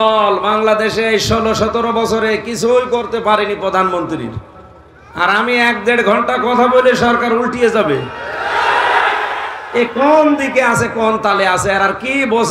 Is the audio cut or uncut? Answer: uncut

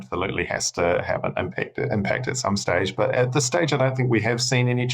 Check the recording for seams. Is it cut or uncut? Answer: cut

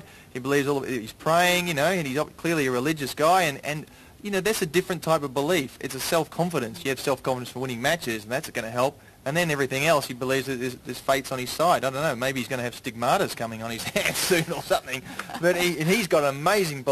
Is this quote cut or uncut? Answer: uncut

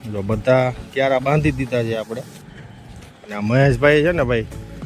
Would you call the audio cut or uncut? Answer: uncut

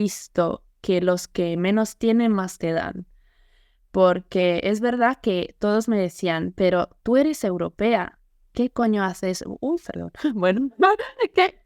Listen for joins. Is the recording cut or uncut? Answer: uncut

